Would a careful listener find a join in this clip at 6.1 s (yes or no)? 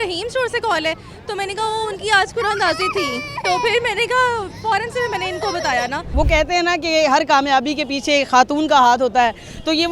yes